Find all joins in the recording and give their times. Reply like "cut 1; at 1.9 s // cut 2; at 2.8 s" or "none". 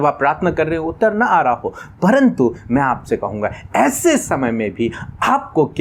none